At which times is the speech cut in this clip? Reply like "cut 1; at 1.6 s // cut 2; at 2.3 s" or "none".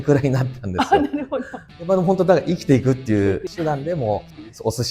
cut 1; at 1.6 s // cut 2; at 3.5 s

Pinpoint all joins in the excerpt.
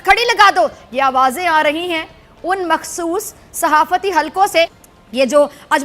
cut 1; at 4.9 s

